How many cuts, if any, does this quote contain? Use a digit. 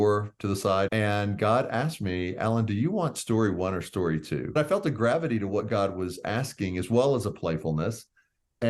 2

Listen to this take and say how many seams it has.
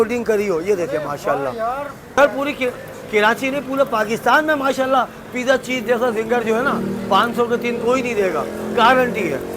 1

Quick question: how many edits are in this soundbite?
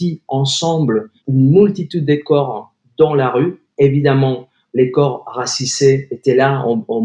1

